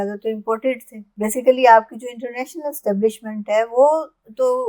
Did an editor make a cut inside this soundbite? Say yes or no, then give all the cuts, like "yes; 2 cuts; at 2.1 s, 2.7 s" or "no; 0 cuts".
yes; 1 cut; at 1.0 s